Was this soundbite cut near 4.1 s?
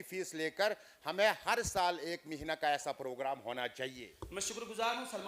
yes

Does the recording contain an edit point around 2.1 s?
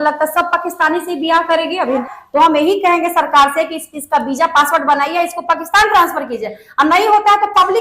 yes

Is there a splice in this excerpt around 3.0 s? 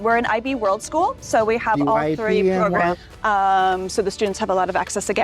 yes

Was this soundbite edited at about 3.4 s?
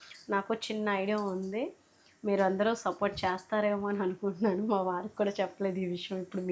no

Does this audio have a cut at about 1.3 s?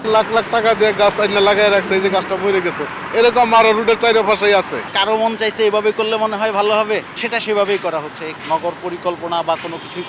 no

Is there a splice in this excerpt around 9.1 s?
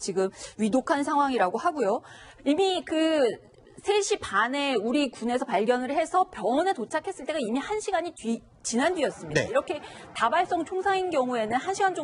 yes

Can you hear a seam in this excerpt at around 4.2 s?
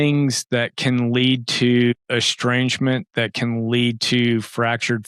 no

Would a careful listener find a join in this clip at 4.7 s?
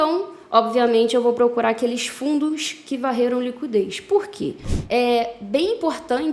yes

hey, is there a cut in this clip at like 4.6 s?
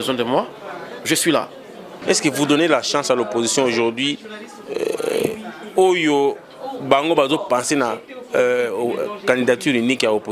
no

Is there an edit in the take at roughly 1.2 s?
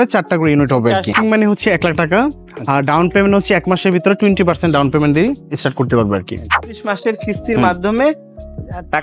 yes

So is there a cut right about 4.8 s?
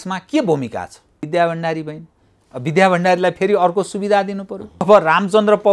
yes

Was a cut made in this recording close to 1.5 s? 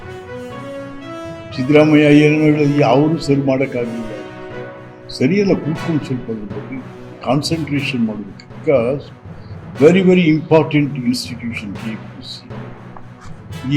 yes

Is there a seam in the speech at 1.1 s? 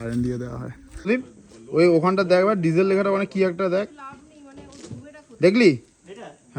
yes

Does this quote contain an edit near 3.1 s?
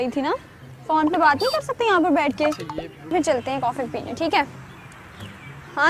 yes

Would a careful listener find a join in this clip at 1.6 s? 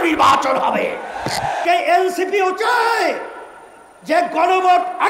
yes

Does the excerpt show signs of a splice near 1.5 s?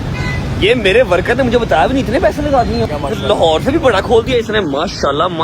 no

